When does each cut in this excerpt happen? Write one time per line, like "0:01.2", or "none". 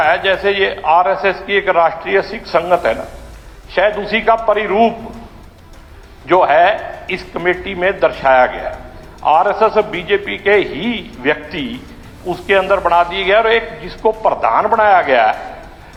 none